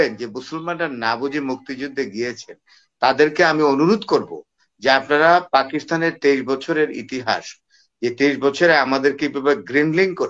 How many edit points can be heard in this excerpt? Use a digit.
0